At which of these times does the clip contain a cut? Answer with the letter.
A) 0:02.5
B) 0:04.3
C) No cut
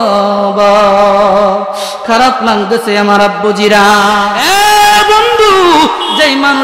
B